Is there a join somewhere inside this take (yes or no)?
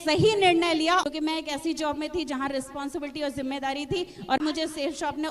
yes